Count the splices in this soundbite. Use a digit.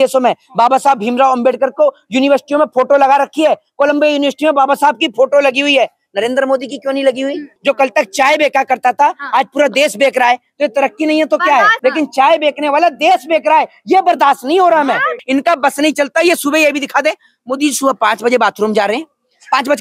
3